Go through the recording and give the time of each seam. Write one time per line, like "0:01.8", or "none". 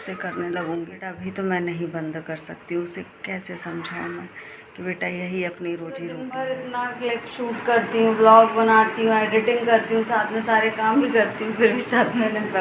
0:01.2
0:06.2